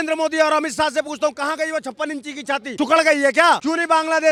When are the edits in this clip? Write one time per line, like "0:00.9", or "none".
none

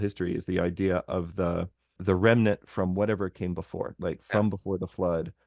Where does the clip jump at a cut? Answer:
0:02.0

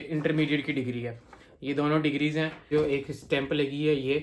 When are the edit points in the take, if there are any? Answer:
0:02.7

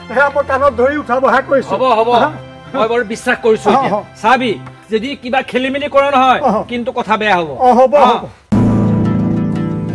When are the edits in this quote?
0:08.5

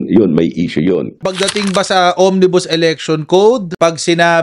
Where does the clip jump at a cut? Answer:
none

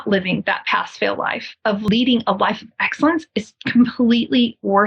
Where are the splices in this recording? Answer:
0:01.9

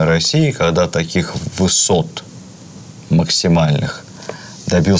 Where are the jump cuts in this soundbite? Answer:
none

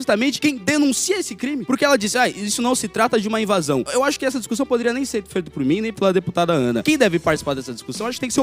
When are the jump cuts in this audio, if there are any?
none

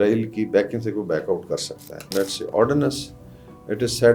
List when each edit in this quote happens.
0:02.1

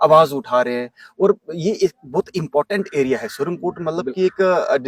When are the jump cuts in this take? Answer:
none

